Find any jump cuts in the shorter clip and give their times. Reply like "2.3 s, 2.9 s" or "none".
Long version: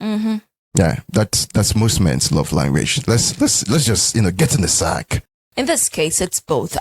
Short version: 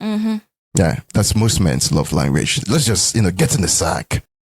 1.0 s, 2.6 s